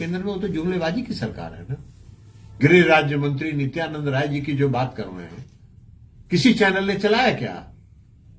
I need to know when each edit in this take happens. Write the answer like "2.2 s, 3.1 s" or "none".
2.4 s